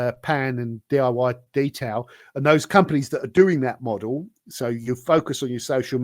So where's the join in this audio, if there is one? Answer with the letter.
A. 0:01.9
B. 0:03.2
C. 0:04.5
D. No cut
D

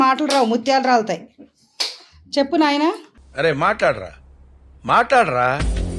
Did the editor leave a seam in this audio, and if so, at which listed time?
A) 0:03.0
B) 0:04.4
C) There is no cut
C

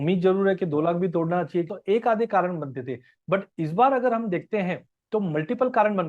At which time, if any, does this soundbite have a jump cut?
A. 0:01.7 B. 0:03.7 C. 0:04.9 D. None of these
A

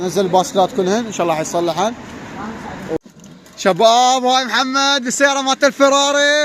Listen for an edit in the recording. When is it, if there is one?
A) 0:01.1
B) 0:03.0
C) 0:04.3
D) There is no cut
B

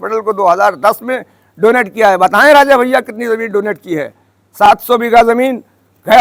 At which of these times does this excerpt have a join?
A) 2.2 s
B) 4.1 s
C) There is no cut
C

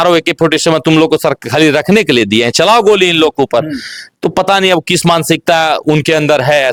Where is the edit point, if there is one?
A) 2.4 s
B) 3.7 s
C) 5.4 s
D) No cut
D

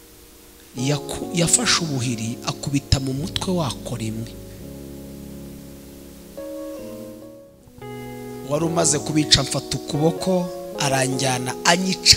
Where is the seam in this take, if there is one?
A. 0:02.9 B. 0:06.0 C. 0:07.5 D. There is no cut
C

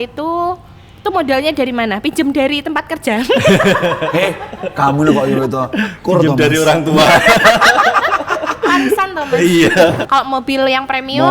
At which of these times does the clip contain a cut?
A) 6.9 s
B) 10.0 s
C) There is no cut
B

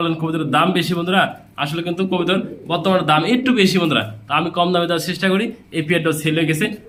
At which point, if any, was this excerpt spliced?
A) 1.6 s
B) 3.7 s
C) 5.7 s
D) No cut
D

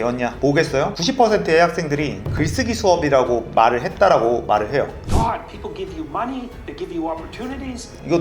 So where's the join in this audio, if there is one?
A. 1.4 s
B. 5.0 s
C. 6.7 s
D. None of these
B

